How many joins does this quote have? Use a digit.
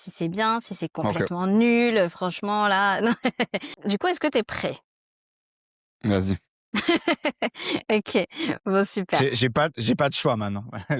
1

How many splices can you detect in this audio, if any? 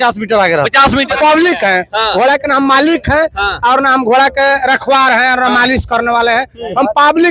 1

